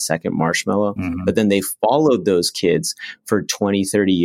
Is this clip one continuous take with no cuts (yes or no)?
yes